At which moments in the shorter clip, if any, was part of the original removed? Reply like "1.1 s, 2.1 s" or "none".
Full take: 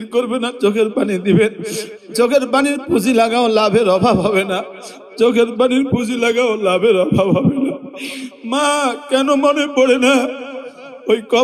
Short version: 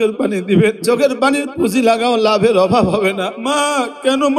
0.8 s, 3.3 s